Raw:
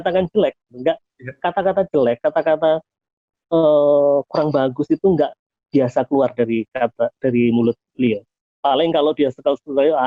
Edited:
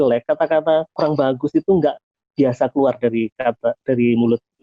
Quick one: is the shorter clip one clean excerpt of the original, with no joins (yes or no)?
no